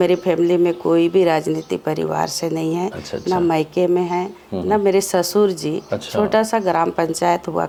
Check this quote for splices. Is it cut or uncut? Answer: uncut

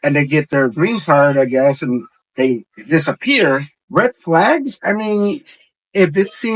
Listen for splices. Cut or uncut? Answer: cut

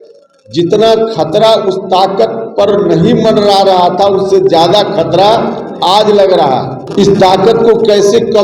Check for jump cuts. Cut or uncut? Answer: cut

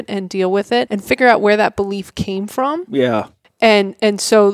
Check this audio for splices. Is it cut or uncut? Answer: cut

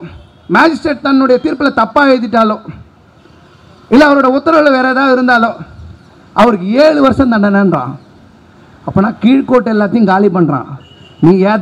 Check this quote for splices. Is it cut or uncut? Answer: uncut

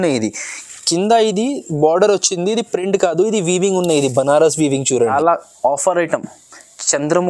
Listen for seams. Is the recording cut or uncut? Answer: cut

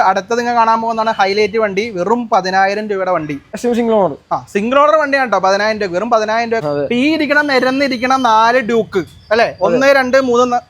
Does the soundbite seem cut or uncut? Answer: cut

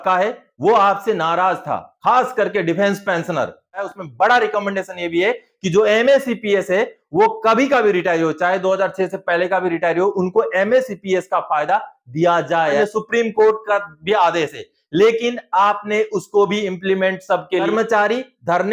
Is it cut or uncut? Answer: cut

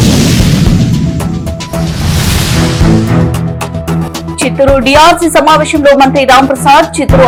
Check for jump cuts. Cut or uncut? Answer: uncut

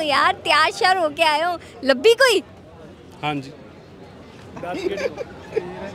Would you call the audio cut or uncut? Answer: uncut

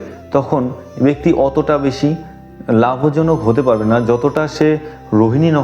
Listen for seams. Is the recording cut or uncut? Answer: uncut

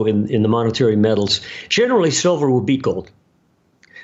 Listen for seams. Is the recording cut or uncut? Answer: uncut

